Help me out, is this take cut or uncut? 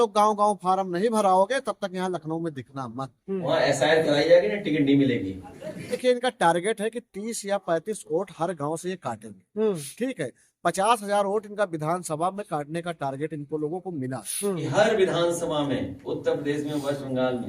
cut